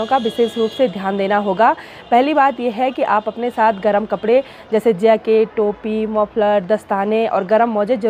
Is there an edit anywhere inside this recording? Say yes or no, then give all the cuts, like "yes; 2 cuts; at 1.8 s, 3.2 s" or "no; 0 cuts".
no; 0 cuts